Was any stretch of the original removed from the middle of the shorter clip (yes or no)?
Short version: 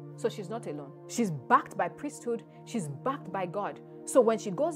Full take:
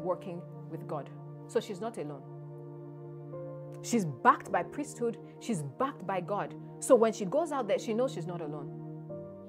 yes